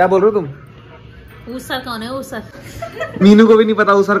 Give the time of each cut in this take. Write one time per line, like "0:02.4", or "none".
0:02.5